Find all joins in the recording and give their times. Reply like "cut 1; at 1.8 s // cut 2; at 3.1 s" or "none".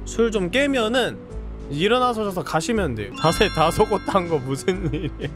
cut 1; at 3.1 s